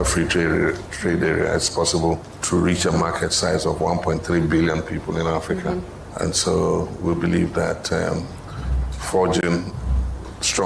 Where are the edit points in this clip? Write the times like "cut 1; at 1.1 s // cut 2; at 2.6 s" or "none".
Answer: cut 1; at 2.3 s // cut 2; at 6.0 s